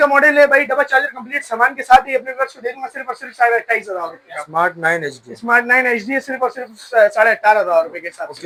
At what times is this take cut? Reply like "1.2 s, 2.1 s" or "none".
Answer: none